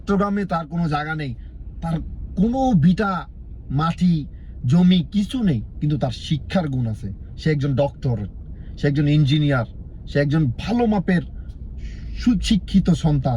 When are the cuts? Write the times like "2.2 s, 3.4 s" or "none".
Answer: none